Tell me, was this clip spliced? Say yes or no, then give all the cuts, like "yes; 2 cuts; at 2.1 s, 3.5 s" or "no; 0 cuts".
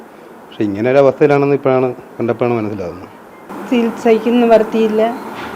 yes; 1 cut; at 3.5 s